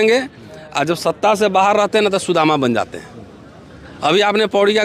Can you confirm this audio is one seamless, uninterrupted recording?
yes; 0 cuts

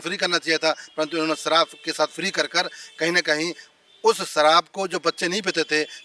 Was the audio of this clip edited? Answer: no; 0 cuts

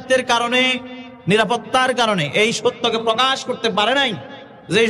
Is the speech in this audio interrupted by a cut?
no; 0 cuts

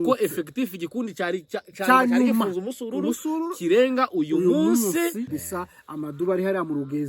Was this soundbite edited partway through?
yes; 1 cut; at 5.3 s

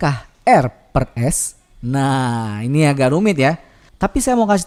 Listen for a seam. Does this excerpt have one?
no; 0 cuts

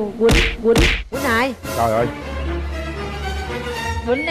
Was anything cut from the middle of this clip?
no; 0 cuts

